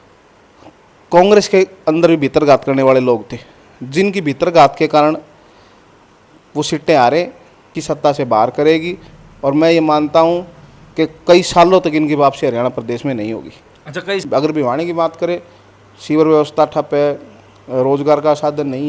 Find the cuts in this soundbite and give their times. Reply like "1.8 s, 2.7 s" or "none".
7.7 s, 14.2 s